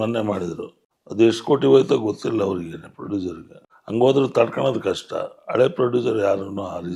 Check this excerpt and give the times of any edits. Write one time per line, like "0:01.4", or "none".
none